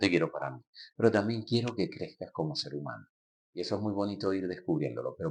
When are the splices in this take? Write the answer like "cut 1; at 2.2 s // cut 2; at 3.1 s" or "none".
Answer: none